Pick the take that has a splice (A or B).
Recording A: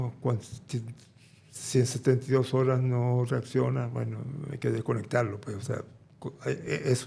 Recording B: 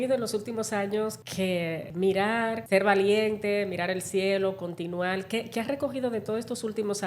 B